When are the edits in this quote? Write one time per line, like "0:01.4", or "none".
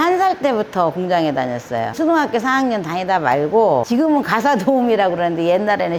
0:02.0
0:03.9